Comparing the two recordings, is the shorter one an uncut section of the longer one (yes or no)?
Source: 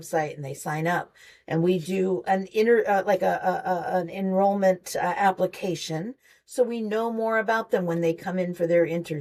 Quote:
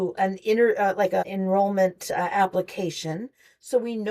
no